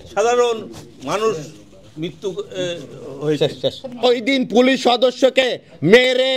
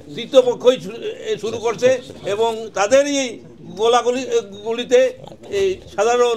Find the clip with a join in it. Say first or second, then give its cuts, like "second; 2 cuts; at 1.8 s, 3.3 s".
first; 1 cut; at 4.0 s